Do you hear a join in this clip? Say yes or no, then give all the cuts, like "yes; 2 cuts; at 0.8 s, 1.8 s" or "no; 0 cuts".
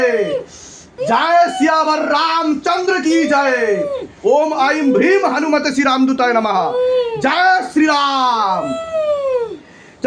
no; 0 cuts